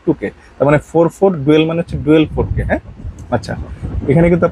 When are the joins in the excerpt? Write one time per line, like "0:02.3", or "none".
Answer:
none